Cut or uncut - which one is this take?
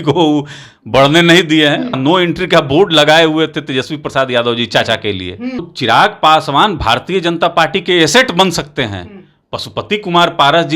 cut